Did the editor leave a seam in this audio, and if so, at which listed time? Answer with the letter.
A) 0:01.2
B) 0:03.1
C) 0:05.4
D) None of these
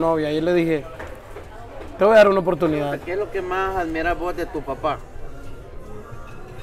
B